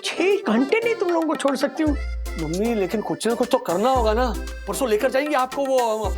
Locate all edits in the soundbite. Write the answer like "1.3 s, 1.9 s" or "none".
2.0 s